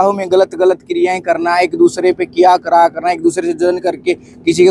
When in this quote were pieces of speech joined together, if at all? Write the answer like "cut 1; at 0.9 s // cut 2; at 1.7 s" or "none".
none